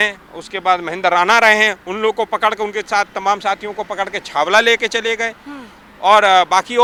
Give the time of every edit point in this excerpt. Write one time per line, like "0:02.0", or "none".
none